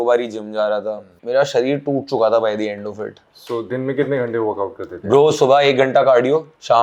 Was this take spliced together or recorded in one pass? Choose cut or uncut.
uncut